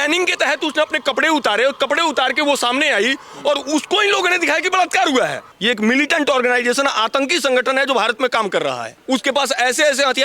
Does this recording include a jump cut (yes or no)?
yes